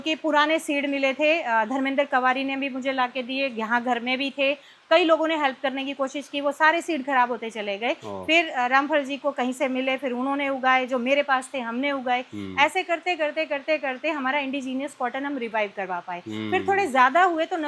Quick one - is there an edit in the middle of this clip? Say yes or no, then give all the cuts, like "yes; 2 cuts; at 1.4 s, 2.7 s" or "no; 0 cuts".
no; 0 cuts